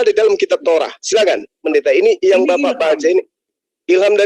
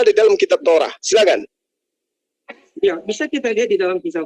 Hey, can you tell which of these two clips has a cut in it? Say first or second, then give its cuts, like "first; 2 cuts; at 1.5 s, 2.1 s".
first; 1 cut; at 1.6 s